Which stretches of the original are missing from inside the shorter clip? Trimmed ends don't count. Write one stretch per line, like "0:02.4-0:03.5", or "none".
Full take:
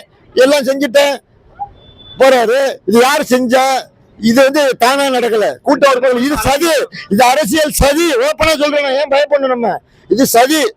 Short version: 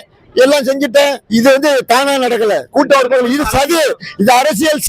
0:01.2-0:04.1

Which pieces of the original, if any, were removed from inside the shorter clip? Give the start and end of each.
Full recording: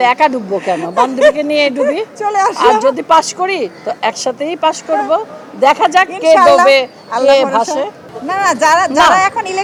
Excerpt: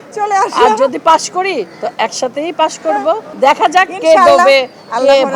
0:05.3-0:05.5

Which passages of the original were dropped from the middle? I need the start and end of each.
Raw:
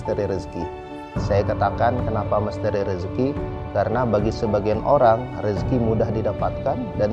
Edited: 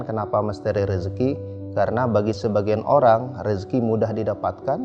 none

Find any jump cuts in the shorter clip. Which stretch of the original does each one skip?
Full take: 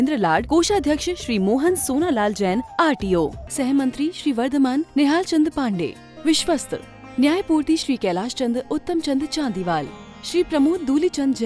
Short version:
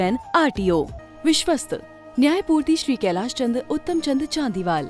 0:03.4-0:06.0

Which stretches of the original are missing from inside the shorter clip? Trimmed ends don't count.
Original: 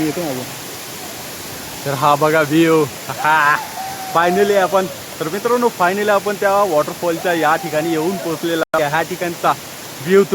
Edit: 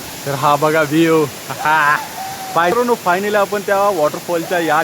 0:04.3-0:05.5

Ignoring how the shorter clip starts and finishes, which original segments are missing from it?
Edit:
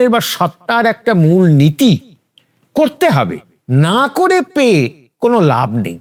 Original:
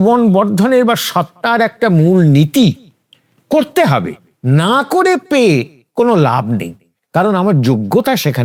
none

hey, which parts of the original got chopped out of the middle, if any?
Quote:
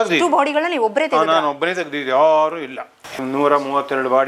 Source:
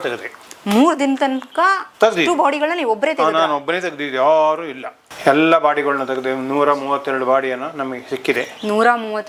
0:05.2-0:06.3

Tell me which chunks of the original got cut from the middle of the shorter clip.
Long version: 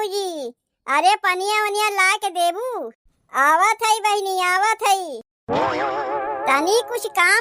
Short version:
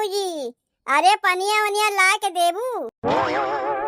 0:02.9-0:05.4

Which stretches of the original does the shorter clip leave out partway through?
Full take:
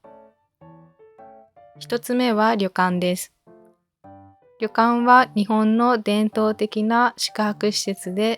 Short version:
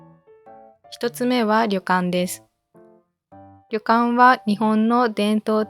0:01.7-0:01.9

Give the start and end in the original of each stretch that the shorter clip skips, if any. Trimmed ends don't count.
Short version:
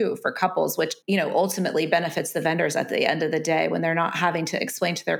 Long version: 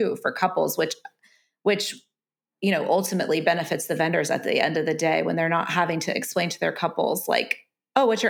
0:01.0-0:02.5

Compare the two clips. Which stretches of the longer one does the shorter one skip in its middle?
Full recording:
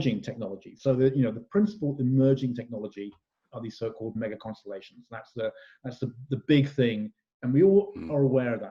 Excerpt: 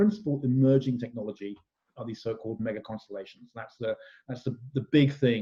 none

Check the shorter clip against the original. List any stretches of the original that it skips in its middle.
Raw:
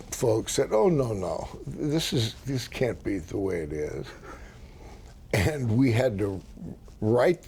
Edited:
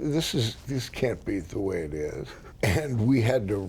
0:04.2-0:05.1

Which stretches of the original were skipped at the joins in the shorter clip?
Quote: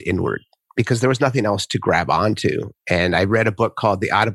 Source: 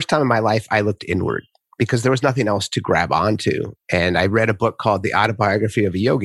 none

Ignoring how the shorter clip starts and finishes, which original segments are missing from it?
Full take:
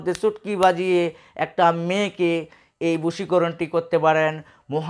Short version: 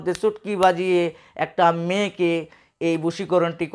none

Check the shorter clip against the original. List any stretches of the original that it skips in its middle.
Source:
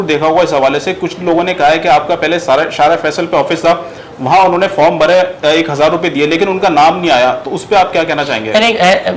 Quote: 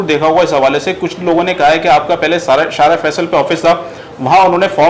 none

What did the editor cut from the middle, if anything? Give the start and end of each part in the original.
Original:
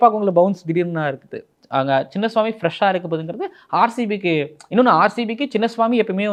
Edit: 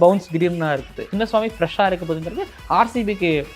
0:01.4-0:02.1

